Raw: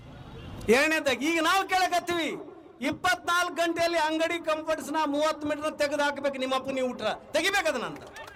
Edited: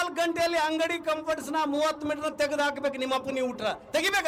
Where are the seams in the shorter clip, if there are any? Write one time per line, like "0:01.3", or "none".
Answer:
none

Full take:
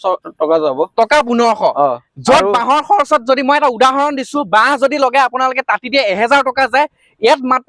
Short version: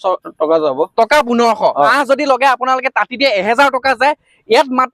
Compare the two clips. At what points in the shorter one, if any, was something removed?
0:01.9

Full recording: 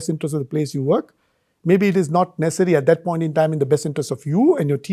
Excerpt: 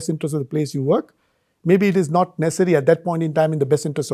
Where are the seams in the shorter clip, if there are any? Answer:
none

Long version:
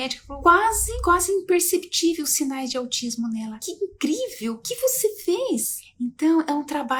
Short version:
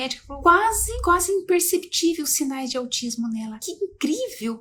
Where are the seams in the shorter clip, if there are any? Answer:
none

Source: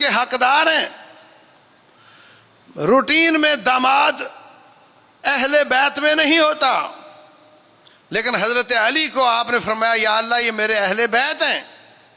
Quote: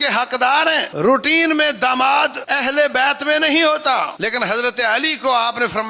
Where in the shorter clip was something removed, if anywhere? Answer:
0:00.9
0:02.4
0:04.1

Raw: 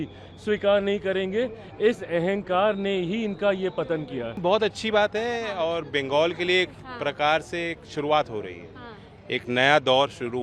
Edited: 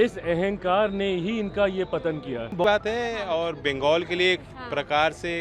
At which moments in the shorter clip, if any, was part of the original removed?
0:02.6

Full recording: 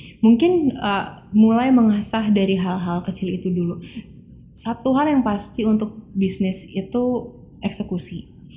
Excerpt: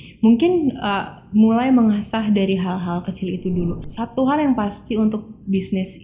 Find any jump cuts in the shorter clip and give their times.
0:03.8

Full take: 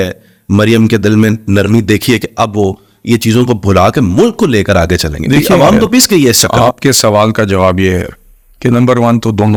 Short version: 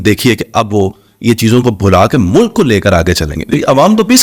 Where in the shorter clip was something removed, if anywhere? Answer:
none

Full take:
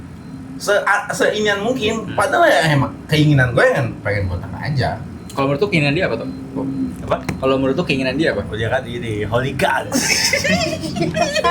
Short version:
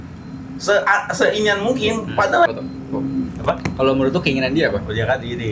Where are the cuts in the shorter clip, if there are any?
0:02.5

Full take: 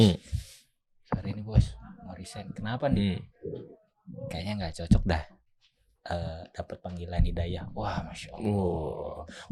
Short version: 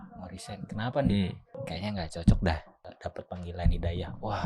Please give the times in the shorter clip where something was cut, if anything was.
0:01.4
0:02.9

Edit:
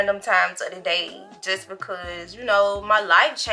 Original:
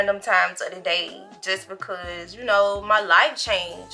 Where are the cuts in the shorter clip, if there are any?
none

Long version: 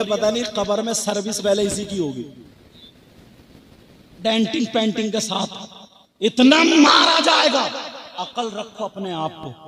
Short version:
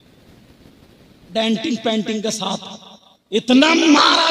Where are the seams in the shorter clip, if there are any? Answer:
none

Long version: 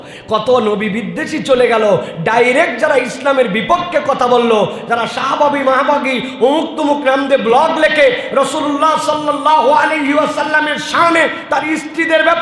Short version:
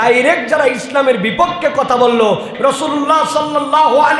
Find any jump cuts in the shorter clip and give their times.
0:02.5

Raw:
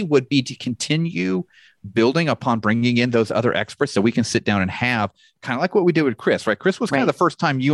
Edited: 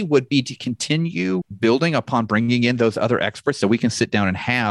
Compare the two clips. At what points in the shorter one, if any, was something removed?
0:01.5

